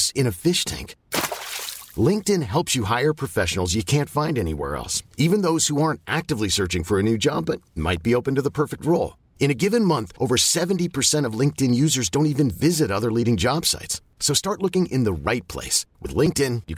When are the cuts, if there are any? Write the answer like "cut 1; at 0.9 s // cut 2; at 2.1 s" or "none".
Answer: none